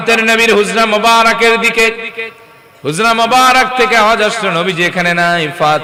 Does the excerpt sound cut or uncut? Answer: uncut